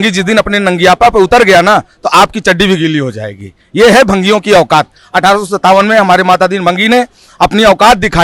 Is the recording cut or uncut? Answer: uncut